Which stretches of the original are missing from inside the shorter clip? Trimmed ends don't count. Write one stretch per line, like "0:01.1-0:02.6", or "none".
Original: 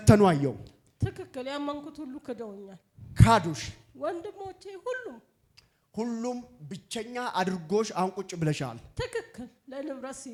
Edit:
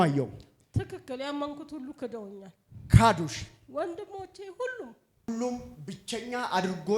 0:05.5-0:06.1